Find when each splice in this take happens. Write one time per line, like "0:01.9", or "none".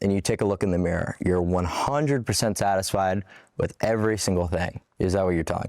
0:04.8